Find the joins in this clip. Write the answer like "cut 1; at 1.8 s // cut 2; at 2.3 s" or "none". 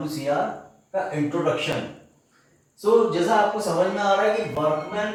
none